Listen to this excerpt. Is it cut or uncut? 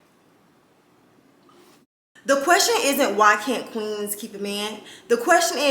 cut